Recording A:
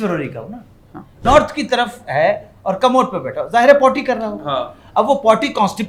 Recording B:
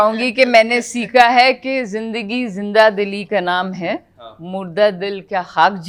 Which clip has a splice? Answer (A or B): A